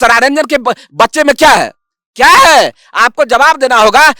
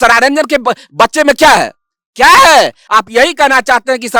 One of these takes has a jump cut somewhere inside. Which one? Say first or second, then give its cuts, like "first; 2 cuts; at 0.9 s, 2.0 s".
second; 1 cut; at 2.8 s